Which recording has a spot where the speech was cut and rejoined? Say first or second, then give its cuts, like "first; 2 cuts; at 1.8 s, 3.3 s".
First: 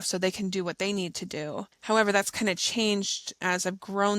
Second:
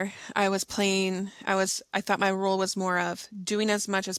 first; 2 cuts; at 1.7 s, 3.3 s